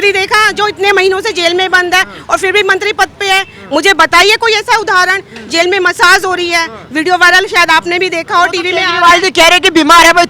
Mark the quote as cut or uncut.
uncut